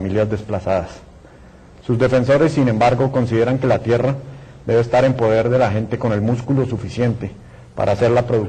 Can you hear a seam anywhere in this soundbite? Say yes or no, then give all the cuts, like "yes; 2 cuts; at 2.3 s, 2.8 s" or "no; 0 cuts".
no; 0 cuts